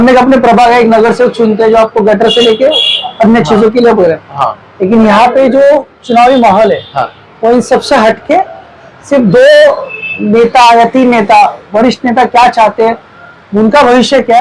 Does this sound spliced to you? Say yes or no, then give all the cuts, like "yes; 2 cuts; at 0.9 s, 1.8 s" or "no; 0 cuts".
no; 0 cuts